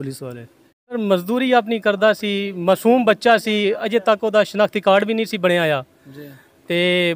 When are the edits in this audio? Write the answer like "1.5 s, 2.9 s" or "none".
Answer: 0.9 s